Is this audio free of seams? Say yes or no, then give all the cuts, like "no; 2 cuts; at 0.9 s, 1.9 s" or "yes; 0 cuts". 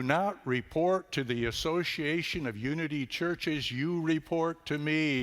yes; 0 cuts